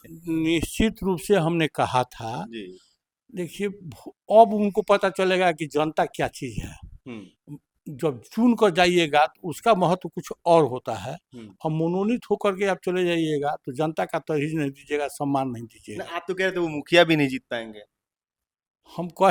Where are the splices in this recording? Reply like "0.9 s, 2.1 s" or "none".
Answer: none